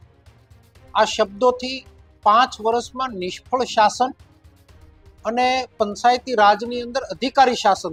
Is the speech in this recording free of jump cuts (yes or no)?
yes